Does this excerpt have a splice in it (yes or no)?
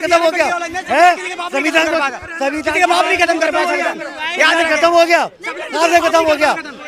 no